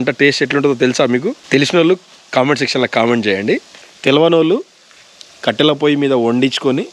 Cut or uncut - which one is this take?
uncut